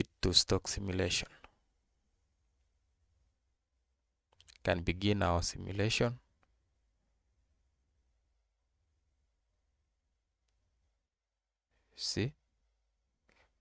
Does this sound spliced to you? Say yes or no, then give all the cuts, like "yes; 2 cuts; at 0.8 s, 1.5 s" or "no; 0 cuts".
no; 0 cuts